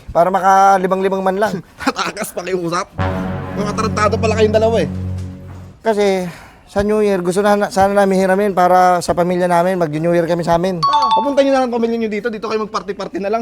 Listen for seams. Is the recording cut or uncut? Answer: uncut